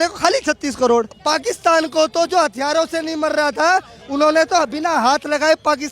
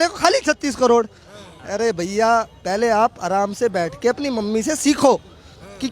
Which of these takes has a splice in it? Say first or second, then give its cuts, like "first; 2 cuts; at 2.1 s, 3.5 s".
first; 1 cut; at 1.1 s